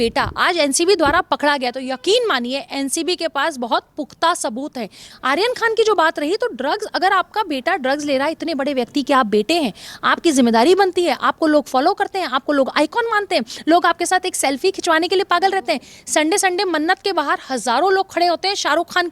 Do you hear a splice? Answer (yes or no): yes